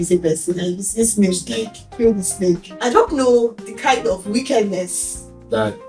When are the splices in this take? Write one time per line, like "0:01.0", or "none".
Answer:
0:02.7